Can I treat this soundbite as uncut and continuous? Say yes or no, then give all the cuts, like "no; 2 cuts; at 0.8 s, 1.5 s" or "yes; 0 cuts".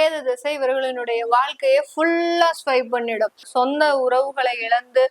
no; 1 cut; at 3.5 s